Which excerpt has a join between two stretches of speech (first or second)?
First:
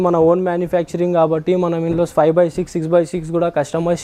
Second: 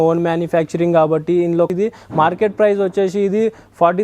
second